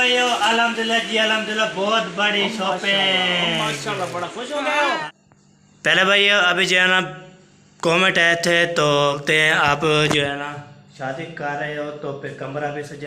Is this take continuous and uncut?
no; 2 cuts; at 5.0 s, 9.2 s

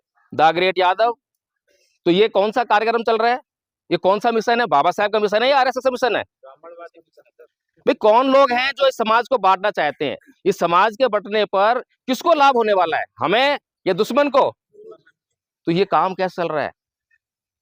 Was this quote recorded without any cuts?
yes; 0 cuts

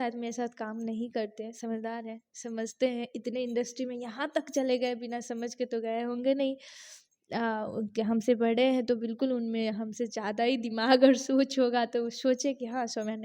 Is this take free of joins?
yes; 0 cuts

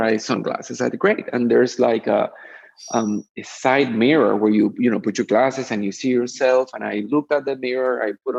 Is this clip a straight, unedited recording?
yes; 0 cuts

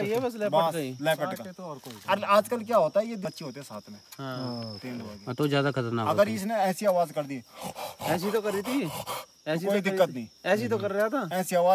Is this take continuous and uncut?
no; 1 cut; at 3.2 s

